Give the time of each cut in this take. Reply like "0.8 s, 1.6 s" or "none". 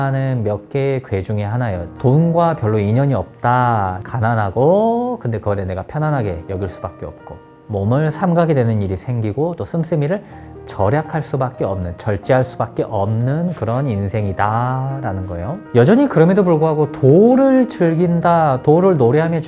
1.9 s, 4.0 s

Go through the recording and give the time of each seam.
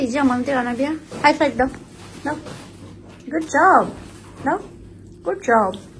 none

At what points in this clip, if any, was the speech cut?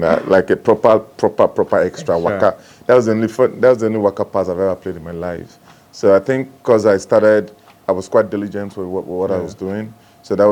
none

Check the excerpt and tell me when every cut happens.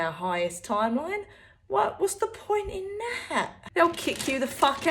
3.6 s

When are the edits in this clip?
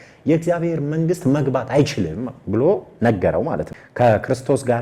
3.8 s

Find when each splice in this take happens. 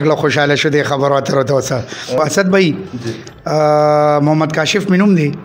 2.2 s

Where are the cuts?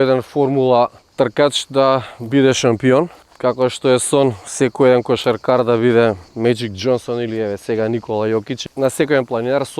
1.0 s, 3.2 s, 8.6 s

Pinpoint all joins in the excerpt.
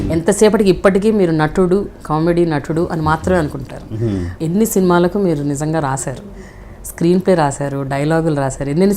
4.3 s

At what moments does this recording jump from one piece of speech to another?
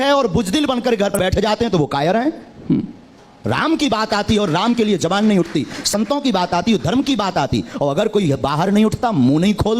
1.1 s

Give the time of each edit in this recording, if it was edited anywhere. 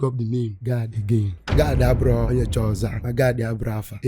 1.4 s

